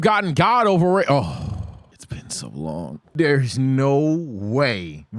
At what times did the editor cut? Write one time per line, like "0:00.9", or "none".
none